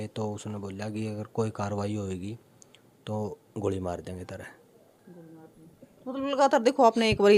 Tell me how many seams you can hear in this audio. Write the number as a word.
zero